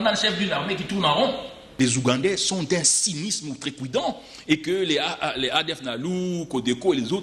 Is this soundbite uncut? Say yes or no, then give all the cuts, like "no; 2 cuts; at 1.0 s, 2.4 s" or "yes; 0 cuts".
no; 1 cut; at 1.6 s